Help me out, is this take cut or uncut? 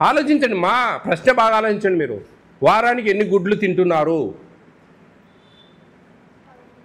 uncut